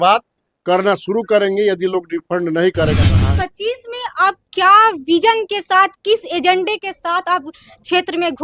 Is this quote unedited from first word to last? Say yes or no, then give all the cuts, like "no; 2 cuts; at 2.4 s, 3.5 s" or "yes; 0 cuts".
no; 1 cut; at 3.1 s